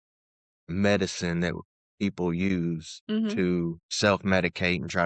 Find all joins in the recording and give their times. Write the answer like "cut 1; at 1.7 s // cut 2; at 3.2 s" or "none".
cut 1; at 3.8 s